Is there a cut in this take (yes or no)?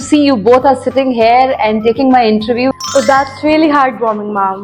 yes